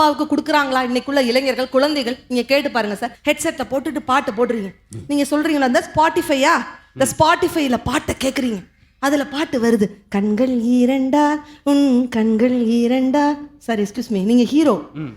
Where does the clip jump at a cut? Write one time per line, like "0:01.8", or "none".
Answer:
0:03.1